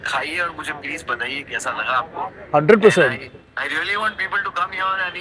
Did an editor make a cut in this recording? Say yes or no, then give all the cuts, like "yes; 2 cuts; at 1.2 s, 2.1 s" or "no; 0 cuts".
no; 0 cuts